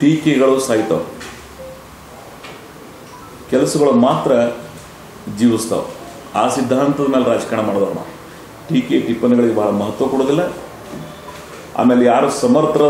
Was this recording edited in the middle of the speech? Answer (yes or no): no